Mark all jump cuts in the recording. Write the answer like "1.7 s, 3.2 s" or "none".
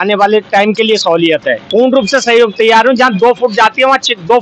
1.6 s